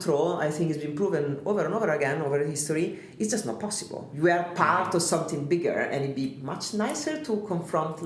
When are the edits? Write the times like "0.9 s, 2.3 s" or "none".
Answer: none